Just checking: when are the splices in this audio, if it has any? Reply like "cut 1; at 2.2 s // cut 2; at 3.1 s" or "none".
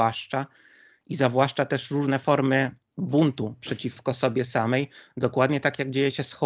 none